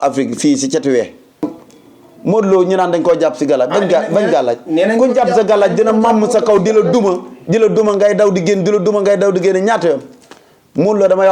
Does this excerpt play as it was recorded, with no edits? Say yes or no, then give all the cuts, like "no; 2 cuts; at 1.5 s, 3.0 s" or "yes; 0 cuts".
no; 1 cut; at 1.4 s